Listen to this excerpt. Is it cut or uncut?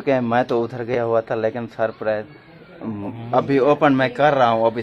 uncut